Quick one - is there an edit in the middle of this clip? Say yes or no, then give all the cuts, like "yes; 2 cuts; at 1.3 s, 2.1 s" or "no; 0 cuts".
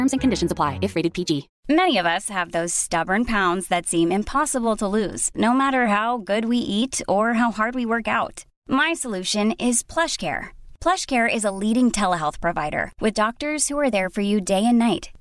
yes; 1 cut; at 1.5 s